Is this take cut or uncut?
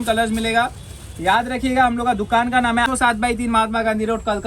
cut